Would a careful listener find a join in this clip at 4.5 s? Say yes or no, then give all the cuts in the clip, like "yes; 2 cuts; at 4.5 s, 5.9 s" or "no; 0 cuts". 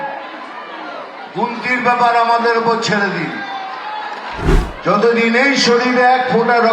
yes; 1 cut; at 4.5 s